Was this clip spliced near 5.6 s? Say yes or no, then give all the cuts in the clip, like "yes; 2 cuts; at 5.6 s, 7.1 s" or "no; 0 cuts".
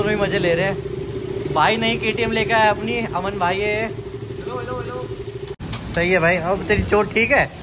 yes; 1 cut; at 5.6 s